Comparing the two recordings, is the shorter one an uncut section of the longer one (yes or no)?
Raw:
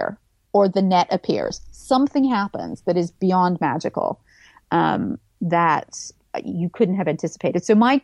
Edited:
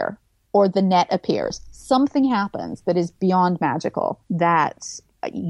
no